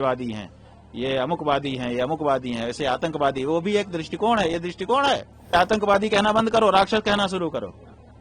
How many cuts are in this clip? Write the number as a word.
one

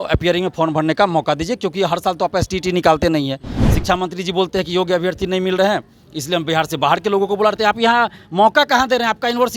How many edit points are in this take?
zero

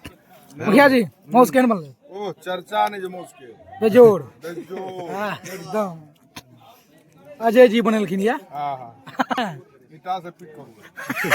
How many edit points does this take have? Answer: one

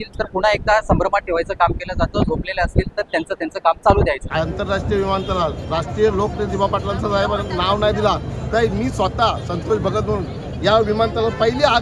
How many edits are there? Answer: one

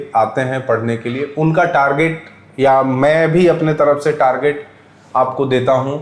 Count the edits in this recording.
zero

